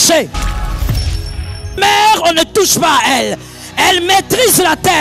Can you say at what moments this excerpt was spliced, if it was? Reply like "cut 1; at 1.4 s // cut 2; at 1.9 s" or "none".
none